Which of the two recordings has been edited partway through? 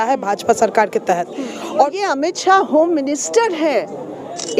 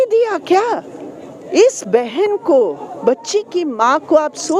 first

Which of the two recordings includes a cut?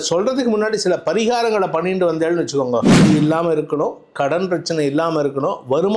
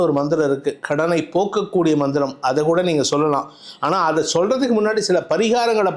first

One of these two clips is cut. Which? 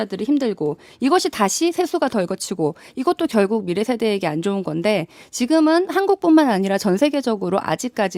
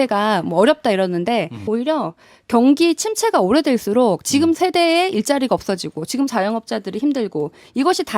second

